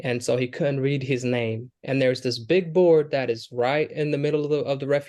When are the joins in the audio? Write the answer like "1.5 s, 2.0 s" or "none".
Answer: none